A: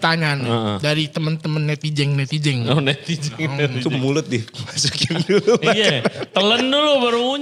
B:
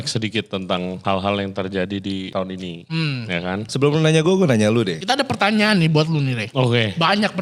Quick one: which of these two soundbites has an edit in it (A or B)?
B